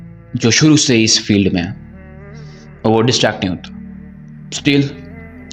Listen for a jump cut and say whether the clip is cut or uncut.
uncut